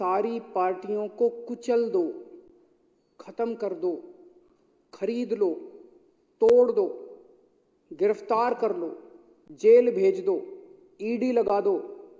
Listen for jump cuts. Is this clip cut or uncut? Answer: uncut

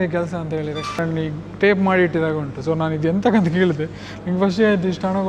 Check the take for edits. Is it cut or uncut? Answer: cut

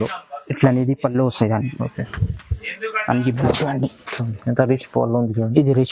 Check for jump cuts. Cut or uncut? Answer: cut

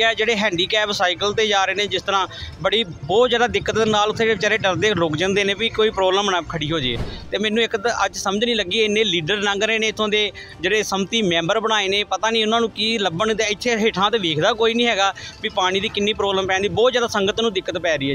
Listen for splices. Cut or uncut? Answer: uncut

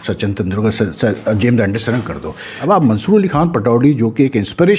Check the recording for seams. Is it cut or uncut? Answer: cut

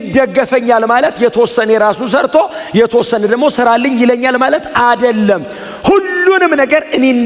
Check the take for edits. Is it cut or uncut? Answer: uncut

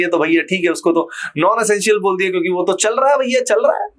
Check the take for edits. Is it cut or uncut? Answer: uncut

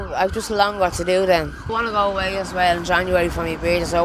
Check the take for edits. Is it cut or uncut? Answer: cut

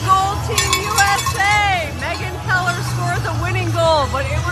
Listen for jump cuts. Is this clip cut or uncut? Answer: uncut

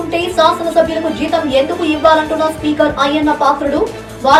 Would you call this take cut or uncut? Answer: uncut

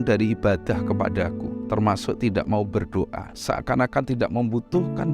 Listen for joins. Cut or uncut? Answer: cut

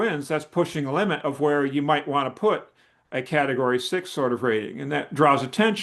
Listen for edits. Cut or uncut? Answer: uncut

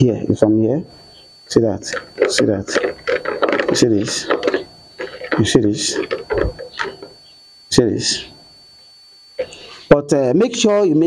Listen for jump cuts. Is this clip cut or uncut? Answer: uncut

